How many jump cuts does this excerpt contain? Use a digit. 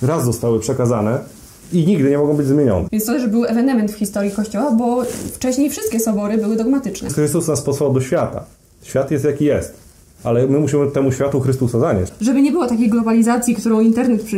3